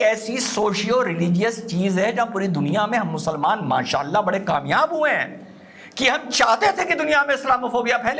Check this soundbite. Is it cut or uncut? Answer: uncut